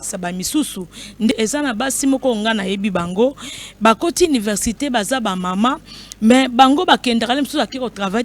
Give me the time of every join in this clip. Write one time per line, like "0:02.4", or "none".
0:01.3